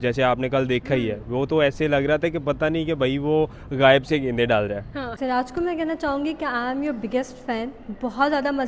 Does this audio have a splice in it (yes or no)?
yes